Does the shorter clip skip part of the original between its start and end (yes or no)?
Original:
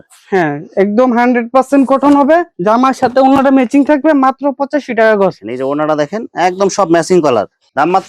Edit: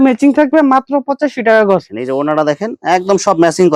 no